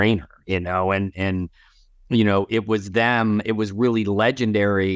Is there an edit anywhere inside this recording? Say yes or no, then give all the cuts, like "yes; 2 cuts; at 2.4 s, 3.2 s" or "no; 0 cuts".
no; 0 cuts